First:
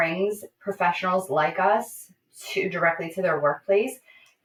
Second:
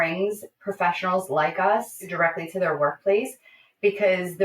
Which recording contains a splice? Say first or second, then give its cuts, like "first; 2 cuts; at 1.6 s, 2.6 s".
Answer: second; 1 cut; at 2.1 s